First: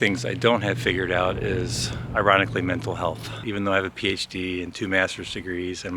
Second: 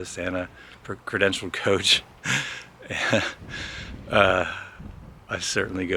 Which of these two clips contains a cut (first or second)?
first